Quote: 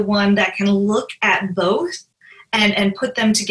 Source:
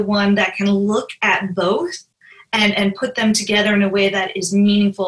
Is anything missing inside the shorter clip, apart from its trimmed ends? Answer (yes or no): no